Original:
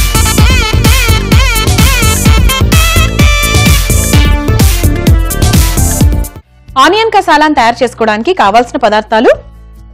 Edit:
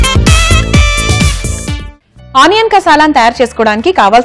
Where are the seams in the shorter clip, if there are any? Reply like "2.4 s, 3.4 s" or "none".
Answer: 1.9 s